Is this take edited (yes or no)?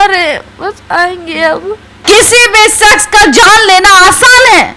yes